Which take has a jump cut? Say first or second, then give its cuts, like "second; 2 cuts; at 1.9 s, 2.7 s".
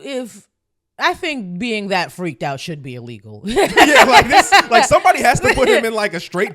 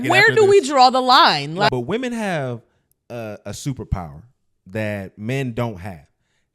second; 1 cut; at 1.7 s